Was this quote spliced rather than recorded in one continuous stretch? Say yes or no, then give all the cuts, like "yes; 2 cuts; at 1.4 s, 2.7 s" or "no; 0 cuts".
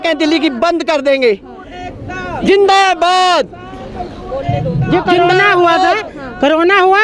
no; 0 cuts